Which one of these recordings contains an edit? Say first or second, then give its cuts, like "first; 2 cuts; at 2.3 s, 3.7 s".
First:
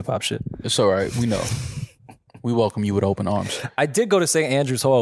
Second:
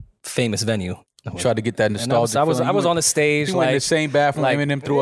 second; 1 cut; at 1.0 s